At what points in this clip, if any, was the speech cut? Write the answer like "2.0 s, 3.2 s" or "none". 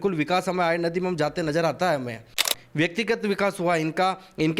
2.5 s